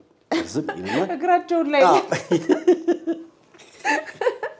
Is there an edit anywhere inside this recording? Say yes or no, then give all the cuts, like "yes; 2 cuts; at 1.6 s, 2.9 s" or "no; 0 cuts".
no; 0 cuts